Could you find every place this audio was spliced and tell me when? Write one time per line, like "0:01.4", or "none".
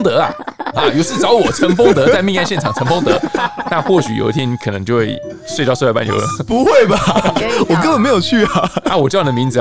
none